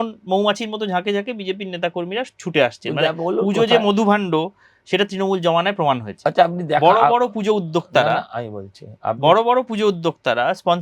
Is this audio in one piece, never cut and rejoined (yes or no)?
yes